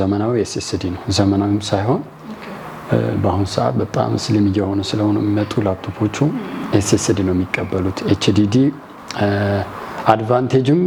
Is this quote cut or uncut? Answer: uncut